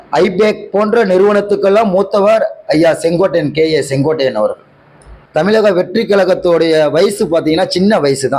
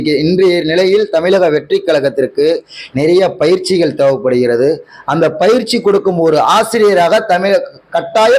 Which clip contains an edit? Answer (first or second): first